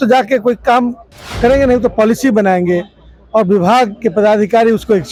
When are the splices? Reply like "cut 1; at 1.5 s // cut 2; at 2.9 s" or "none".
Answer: none